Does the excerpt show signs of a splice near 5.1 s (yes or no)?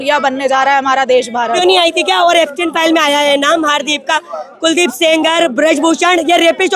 no